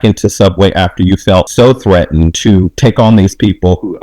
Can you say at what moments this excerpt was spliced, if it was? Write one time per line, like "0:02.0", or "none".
0:01.5
0:02.3